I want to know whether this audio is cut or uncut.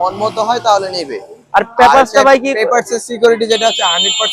uncut